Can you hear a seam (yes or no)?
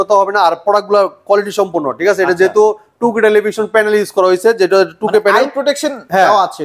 no